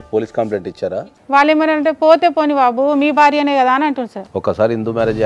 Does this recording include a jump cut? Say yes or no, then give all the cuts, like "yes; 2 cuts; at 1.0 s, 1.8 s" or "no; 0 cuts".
yes; 2 cuts; at 1.0 s, 4.2 s